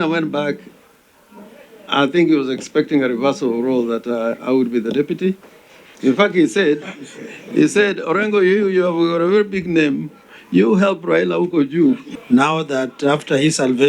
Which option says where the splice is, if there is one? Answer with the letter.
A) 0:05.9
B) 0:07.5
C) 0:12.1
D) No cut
C